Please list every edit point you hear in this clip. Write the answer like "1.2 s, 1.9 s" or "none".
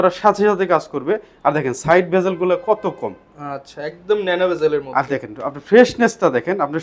none